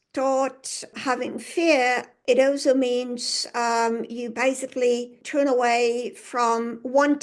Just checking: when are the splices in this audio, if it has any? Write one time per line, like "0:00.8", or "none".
0:00.9
0:02.1
0:05.2